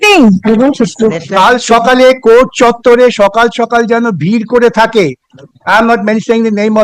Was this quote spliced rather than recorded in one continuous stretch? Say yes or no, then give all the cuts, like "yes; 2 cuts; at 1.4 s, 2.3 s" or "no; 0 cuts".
yes; 1 cut; at 1.2 s